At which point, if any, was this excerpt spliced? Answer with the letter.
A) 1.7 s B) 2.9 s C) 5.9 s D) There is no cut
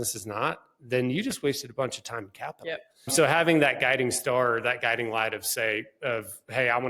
B